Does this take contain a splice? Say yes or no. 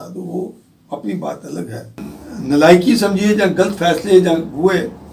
yes